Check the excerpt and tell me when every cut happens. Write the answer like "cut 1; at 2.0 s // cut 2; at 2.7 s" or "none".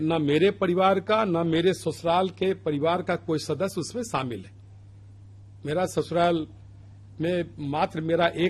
none